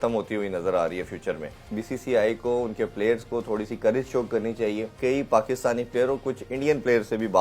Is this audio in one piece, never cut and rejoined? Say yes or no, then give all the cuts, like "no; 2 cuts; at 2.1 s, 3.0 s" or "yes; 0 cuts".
no; 2 cuts; at 1.6 s, 4.9 s